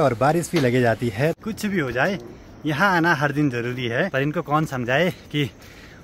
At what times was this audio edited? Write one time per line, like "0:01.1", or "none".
0:01.4
0:04.1